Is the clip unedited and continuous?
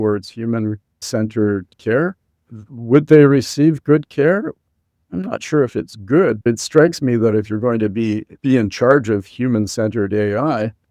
no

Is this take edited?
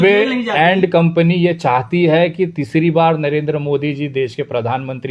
no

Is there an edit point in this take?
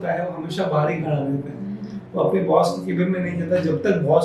no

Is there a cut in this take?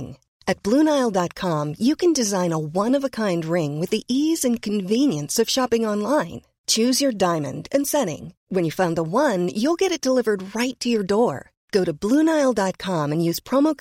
no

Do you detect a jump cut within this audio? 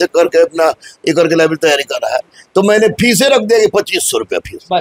no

